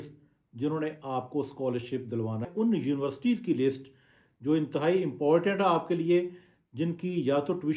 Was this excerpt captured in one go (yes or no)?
no